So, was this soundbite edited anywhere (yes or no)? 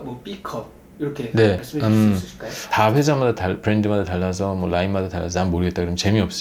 yes